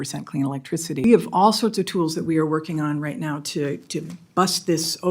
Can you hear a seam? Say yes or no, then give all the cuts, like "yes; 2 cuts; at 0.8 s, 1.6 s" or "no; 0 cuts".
yes; 1 cut; at 1.0 s